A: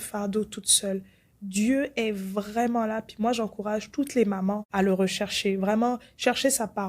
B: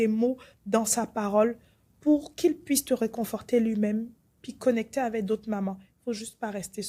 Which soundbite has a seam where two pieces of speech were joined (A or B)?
A